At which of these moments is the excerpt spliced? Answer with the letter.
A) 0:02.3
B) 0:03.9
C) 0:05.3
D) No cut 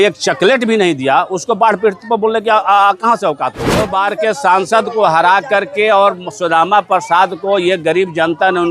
B